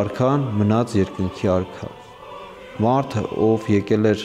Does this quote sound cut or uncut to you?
uncut